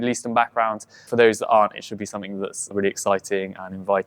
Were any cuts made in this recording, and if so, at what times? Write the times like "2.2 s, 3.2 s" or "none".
2.7 s